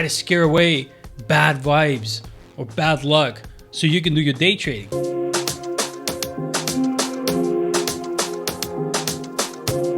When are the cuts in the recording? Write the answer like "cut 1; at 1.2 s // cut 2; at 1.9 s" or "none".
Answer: cut 1; at 4.8 s